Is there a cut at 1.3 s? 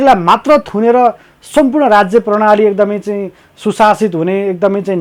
no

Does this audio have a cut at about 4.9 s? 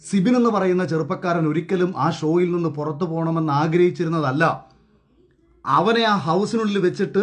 no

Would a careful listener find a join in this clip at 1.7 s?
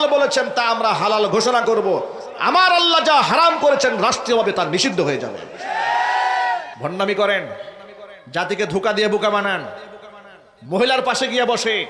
no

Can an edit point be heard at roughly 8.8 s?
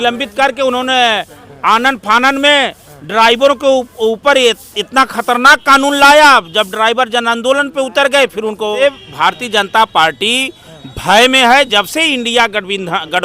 yes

